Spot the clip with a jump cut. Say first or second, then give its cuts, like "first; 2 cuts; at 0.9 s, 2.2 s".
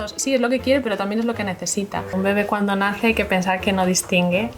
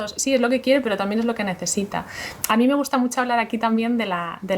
first; 1 cut; at 2.1 s